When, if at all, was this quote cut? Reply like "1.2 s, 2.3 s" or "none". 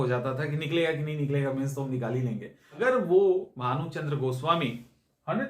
2.6 s

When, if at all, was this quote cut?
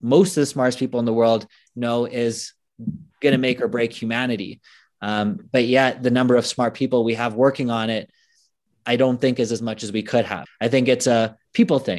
10.4 s

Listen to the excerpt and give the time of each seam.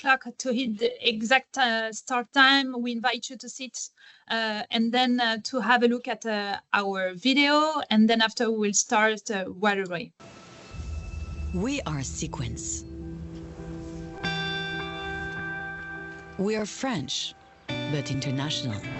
10.2 s

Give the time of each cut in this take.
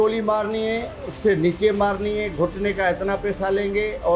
none

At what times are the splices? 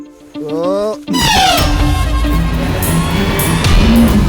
2.4 s

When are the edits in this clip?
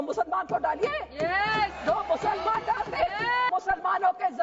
3.5 s

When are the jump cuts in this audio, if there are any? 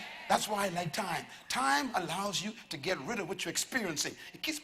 none

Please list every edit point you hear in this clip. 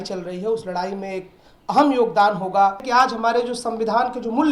2.8 s

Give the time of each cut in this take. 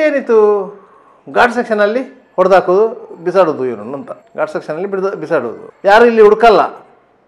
none

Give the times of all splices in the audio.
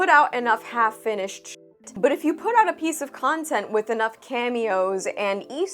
1.9 s

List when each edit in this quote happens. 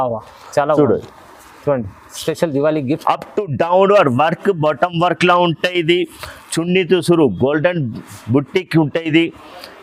none

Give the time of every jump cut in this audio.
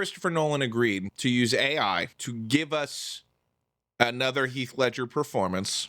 1.1 s, 2.2 s

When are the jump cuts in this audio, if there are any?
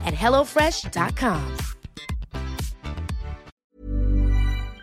3.5 s

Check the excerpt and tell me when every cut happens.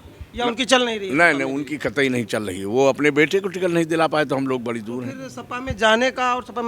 none

